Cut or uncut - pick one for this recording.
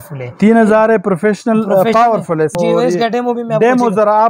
cut